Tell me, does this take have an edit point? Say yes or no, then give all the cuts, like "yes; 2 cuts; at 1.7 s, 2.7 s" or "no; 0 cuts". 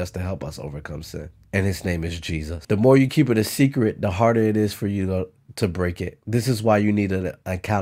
yes; 1 cut; at 2.5 s